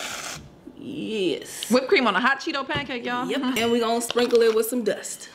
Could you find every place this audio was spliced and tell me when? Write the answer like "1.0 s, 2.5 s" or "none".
3.6 s